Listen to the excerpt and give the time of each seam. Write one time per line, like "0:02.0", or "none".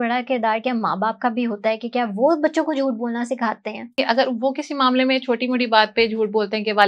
0:04.0

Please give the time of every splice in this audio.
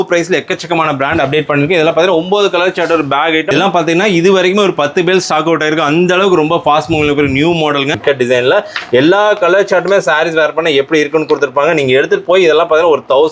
0:03.5
0:08.0

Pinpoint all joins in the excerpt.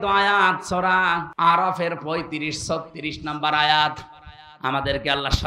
0:01.3

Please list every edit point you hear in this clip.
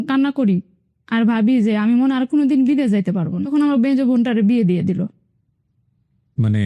0:03.4

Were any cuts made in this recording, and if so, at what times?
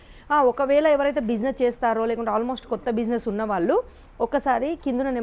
none

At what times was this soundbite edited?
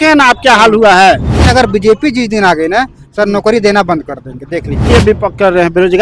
0:01.4
0:04.9

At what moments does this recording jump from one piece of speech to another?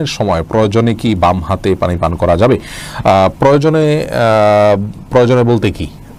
none

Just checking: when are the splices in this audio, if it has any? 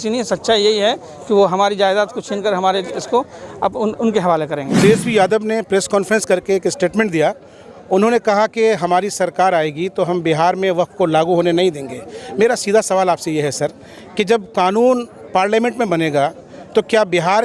0:04.8

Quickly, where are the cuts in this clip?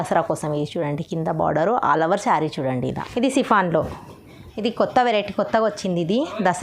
0:03.0

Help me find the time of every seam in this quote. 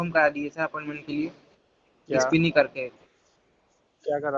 none

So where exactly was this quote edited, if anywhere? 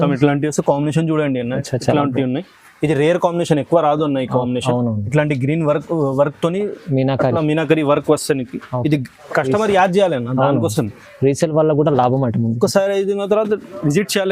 0:09.1

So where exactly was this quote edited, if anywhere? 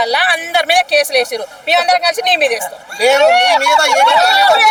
none

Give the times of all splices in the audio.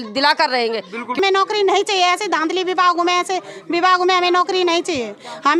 0:01.2

